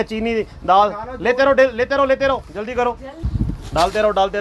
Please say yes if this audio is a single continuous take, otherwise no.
no